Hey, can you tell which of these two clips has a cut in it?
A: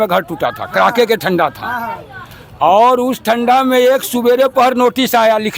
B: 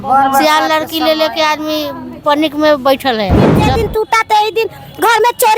B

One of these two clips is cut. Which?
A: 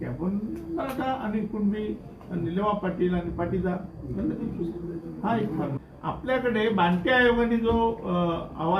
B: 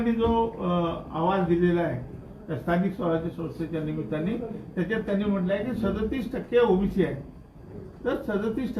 A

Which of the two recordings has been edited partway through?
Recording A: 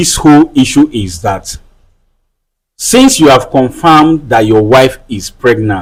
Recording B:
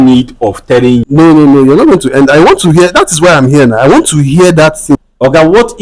B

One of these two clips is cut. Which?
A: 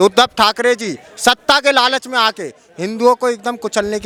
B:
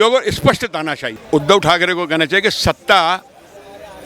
B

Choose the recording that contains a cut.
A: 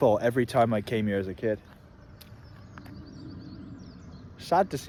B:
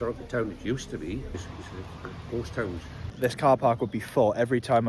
B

